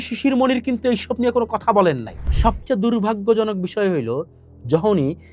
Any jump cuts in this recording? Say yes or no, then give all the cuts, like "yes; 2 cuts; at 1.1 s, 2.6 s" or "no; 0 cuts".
yes; 1 cut; at 2.1 s